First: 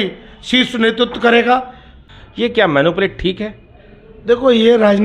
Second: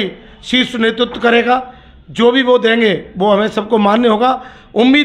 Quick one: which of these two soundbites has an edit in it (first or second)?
first